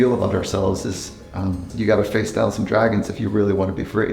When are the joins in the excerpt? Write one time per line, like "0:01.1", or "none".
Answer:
0:01.7